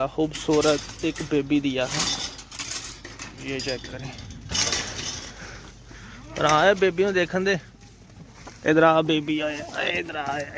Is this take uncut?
yes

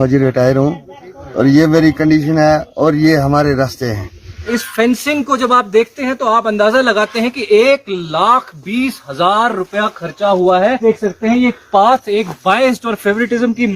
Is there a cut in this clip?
yes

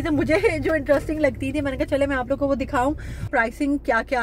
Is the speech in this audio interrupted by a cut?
yes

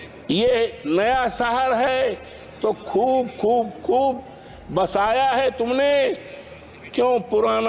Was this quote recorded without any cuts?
yes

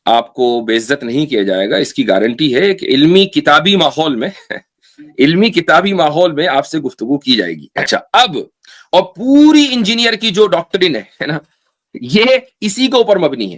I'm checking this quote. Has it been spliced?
yes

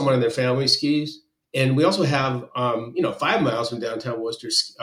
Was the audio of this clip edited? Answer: no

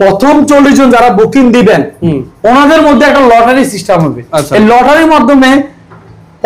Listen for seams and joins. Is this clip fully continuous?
yes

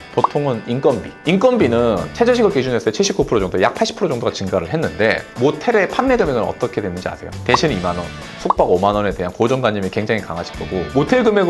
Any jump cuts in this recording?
yes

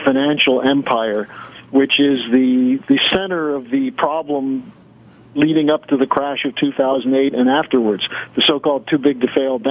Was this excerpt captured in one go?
no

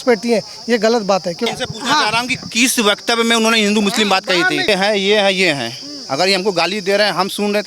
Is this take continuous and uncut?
no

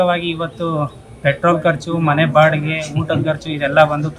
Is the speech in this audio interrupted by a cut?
no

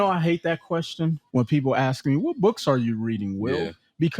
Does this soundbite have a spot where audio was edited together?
yes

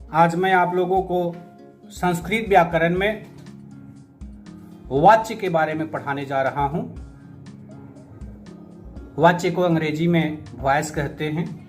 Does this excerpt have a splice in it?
yes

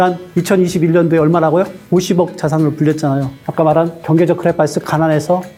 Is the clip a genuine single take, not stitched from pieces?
yes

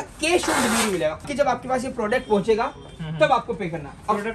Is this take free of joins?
no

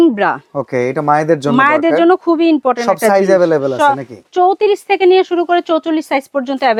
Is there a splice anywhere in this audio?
no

